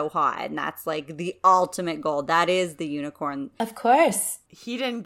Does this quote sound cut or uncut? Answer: uncut